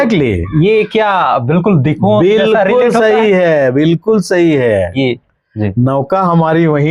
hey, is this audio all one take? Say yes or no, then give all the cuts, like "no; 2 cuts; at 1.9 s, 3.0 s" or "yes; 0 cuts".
yes; 0 cuts